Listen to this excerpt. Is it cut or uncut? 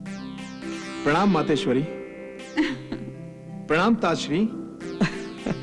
uncut